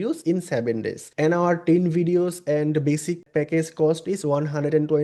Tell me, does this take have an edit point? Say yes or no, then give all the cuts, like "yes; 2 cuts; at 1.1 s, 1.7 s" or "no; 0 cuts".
yes; 2 cuts; at 1.0 s, 3.2 s